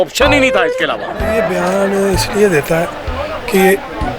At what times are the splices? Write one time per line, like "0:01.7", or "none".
0:01.3

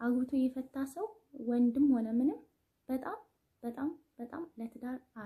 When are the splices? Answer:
none

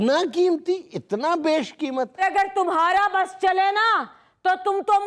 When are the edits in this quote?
0:02.2

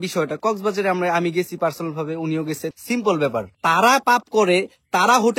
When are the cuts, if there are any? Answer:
0:02.7
0:03.5

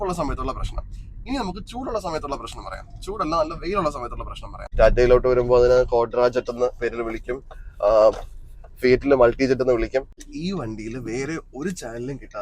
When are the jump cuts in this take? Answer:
0:04.6
0:10.2

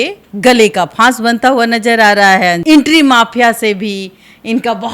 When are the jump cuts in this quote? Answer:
0:02.6

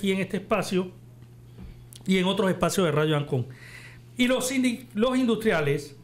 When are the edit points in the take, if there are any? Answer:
none

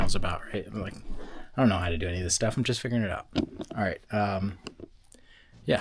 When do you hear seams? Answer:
none

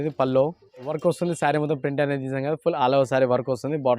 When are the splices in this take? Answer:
0:00.9

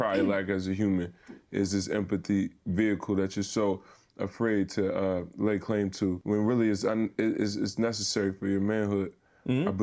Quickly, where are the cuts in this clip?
none

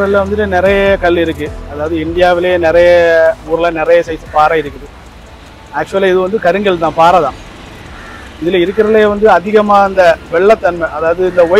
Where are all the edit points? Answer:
none

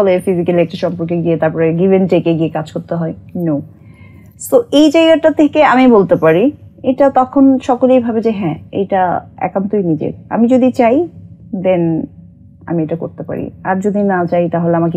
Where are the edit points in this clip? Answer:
none

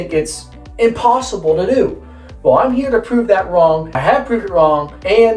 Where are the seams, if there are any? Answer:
none

